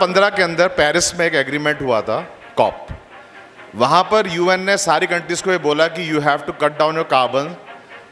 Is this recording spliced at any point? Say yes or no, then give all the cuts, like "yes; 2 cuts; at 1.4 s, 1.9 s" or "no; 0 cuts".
no; 0 cuts